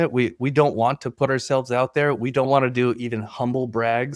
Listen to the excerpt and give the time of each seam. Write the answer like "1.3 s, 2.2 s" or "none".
2.5 s